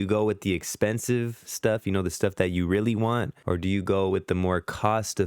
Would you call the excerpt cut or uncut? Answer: cut